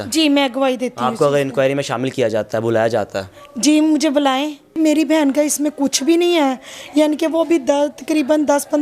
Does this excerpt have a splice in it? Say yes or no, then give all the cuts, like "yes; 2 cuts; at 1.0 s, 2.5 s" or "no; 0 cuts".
yes; 1 cut; at 4.8 s